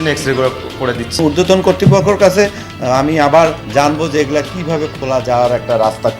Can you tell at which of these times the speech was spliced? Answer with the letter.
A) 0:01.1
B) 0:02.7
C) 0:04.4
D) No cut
A